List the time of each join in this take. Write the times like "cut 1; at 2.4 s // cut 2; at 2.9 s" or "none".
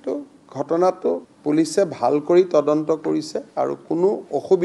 cut 1; at 1.3 s